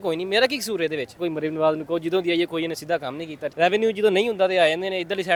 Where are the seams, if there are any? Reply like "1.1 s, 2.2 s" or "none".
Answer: none